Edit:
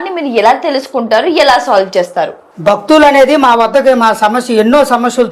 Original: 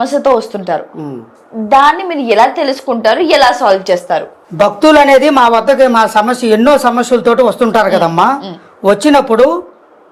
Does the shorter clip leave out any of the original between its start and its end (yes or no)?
no